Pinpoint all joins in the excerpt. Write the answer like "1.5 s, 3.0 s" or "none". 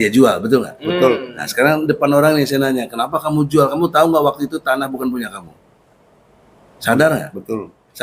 none